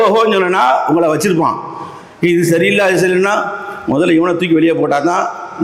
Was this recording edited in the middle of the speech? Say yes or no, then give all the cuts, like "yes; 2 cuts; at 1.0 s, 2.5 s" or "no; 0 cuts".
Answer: no; 0 cuts